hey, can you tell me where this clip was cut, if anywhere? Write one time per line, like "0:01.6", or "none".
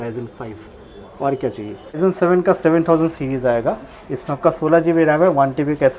0:02.0